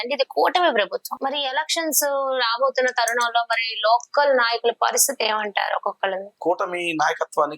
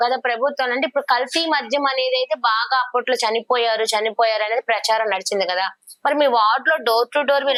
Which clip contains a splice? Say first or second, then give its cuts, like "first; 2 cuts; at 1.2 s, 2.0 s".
first; 2 cuts; at 1.1 s, 6.3 s